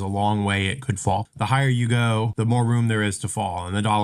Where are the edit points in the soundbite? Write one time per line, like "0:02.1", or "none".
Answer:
0:01.3
0:02.3

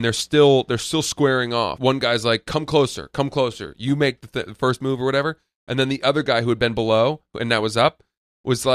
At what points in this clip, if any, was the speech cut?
0:01.7

